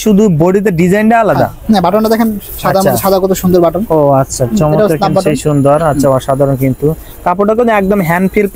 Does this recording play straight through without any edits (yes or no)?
yes